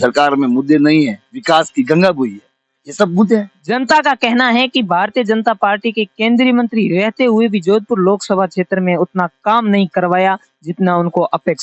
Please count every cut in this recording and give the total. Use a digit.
1